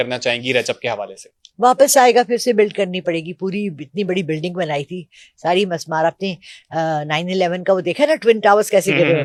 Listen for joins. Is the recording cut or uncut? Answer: uncut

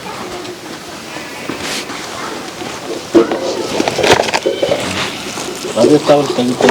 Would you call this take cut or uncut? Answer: cut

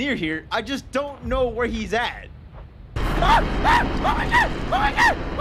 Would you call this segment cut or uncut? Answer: uncut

